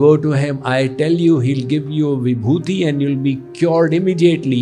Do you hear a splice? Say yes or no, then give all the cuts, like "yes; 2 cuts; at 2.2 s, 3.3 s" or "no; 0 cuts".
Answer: no; 0 cuts